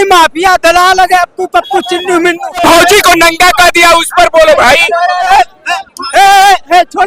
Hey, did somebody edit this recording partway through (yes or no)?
yes